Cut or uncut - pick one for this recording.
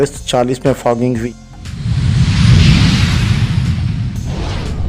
cut